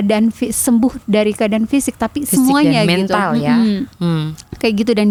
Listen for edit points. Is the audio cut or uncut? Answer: uncut